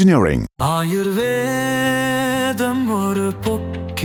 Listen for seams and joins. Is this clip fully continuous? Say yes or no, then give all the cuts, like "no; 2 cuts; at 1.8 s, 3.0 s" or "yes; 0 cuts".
yes; 0 cuts